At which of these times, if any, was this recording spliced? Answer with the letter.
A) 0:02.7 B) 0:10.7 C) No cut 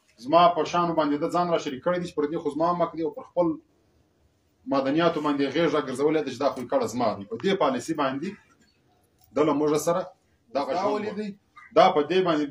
B